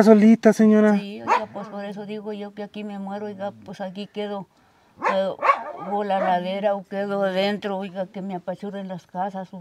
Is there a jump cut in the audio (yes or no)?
no